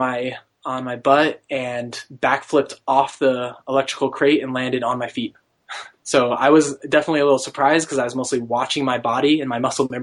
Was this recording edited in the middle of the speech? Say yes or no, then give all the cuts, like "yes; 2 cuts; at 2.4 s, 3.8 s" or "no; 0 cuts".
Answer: no; 0 cuts